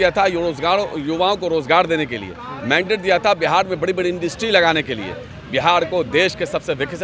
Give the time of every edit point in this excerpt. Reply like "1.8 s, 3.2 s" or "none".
5.3 s